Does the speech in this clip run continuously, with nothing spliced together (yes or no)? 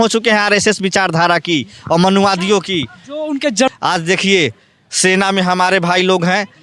no